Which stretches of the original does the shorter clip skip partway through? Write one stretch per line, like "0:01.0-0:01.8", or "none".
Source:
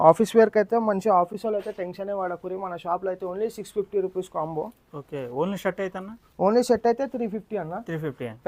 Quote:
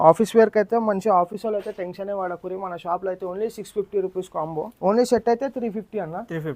0:04.7-0:06.3

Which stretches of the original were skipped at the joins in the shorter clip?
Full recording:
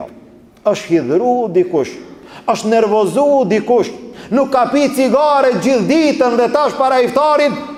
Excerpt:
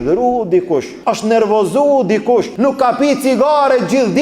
0:02.0-0:02.3
0:03.9-0:04.2

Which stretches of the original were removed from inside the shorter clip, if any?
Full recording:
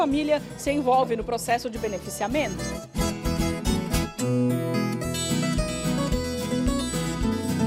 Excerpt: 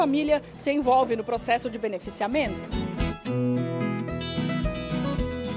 0:02.5-0:03.5

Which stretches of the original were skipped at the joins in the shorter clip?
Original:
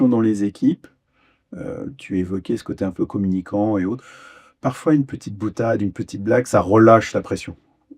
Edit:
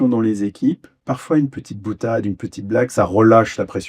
0:00.9-0:04.5

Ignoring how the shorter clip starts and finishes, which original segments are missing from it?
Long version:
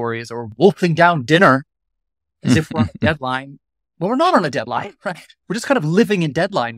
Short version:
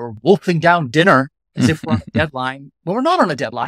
0:01.8-0:02.3
0:03.5-0:03.8

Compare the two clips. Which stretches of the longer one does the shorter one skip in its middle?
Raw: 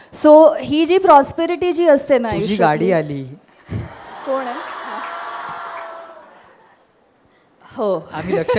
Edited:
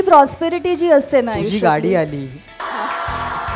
0:03.6-0:04.7

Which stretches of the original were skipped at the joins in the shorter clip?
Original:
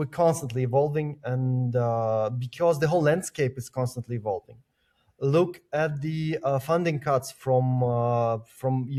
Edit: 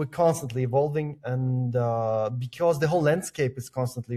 none

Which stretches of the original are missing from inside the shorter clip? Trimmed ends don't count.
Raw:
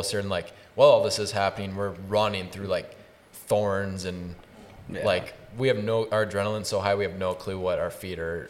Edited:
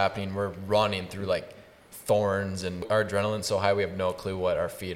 0:04.3-0:06.1

